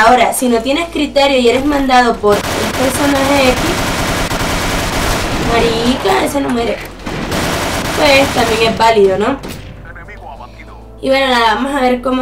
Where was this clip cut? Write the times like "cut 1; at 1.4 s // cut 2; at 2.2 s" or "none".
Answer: cut 1; at 10.3 s